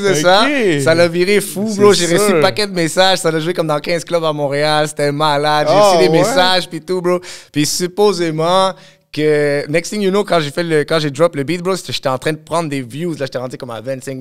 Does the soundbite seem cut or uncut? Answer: uncut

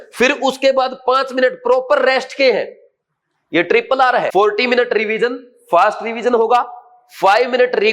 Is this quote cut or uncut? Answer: cut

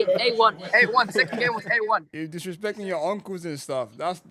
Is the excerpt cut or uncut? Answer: cut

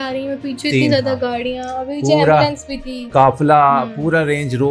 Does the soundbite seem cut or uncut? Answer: uncut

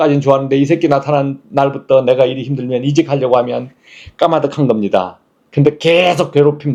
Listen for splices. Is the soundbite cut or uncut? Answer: uncut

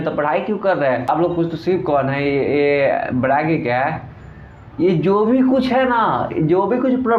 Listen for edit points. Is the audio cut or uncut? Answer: cut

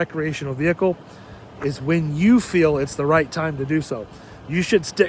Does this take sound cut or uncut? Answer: uncut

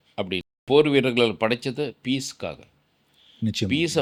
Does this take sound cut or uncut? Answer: uncut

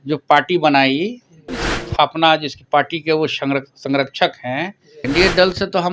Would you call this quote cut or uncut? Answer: cut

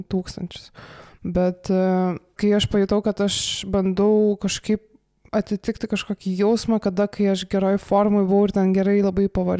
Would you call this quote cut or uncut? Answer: cut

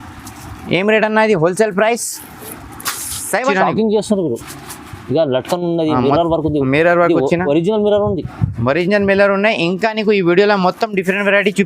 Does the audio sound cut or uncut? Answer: cut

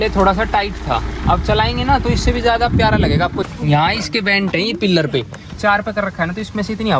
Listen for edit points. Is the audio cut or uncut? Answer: cut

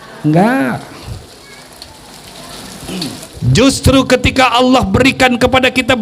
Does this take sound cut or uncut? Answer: cut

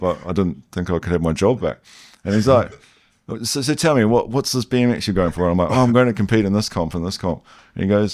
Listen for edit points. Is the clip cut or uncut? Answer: uncut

